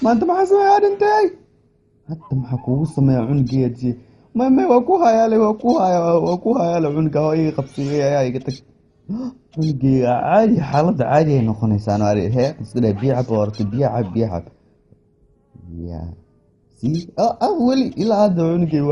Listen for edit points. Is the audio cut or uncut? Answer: uncut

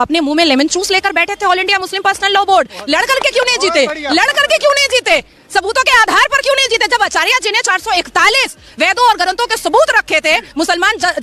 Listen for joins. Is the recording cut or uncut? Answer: uncut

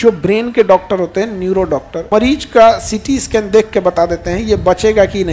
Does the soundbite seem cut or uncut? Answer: cut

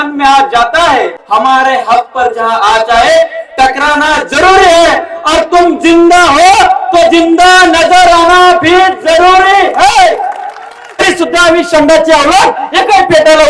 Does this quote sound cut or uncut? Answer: cut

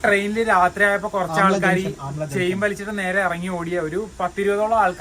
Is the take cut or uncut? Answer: uncut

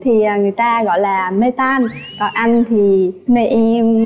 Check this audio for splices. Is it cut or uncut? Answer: uncut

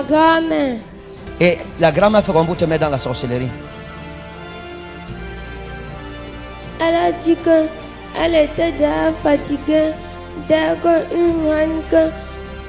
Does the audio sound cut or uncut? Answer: cut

